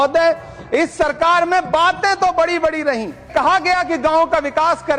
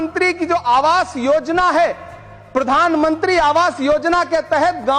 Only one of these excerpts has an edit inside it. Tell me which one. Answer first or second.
first